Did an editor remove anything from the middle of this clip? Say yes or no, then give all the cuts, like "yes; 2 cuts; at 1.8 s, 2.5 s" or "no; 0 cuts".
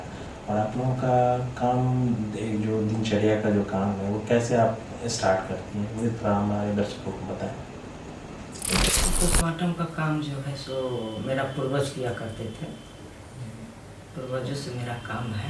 yes; 1 cut; at 9.0 s